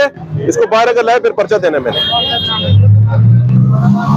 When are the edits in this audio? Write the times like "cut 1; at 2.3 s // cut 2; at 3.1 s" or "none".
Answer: none